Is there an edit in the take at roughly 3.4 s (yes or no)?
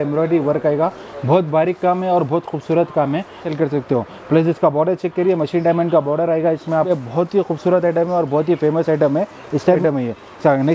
yes